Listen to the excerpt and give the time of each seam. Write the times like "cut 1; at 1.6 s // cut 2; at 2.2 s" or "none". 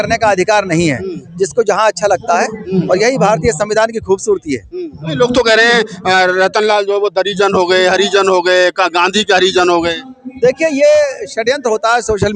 none